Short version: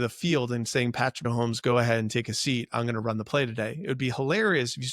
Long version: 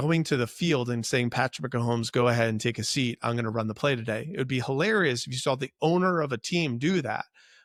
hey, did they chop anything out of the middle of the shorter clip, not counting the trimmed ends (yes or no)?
yes